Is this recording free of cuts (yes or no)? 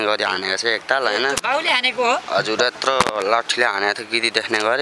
yes